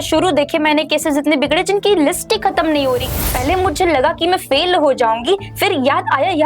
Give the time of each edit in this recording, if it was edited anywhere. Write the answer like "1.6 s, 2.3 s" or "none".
3.1 s